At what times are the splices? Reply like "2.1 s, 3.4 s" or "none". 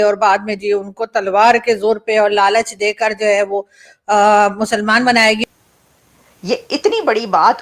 5.4 s